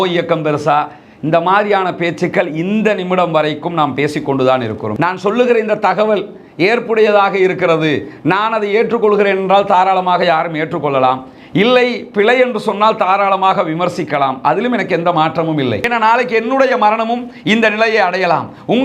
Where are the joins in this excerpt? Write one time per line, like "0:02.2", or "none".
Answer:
0:04.9
0:15.8